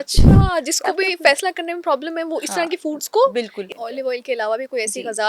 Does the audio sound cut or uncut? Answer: cut